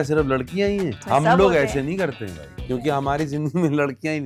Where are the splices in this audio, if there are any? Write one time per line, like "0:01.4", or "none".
0:01.0
0:02.8